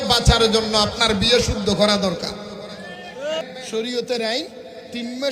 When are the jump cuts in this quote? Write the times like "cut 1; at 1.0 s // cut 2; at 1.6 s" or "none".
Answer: cut 1; at 3.4 s